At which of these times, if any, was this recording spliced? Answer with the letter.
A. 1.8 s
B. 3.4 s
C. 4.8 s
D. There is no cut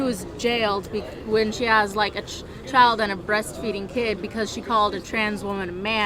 D